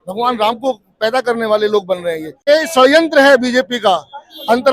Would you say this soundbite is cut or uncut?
cut